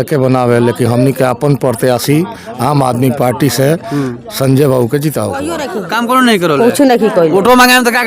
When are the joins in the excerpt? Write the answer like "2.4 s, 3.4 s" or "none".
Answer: 5.7 s